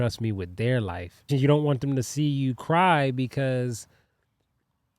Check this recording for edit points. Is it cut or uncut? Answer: cut